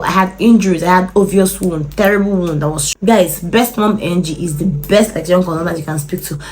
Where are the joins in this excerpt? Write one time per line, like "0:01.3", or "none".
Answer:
0:02.6